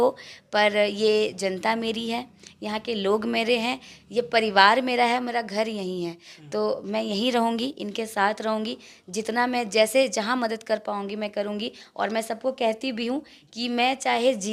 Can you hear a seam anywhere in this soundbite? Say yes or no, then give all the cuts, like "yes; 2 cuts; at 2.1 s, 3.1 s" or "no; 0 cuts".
no; 0 cuts